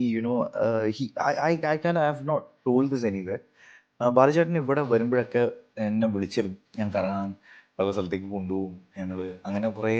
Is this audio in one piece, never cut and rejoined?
no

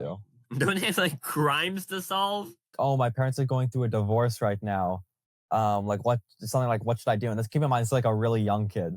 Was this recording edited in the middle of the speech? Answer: yes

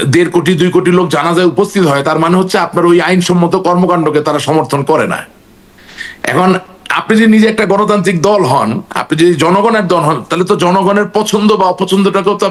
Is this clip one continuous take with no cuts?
yes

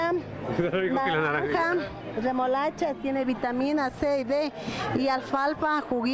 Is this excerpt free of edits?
yes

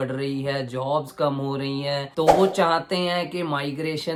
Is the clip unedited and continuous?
yes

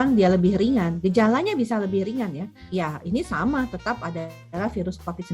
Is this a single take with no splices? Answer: no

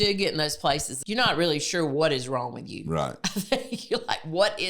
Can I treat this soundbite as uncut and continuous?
no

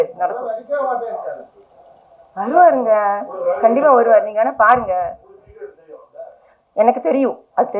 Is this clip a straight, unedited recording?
yes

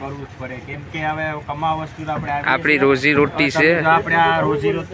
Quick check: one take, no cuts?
yes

